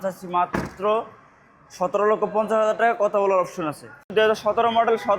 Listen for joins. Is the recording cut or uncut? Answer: cut